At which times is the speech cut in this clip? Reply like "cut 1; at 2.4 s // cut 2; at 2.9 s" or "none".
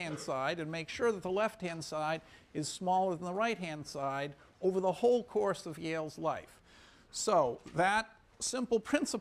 none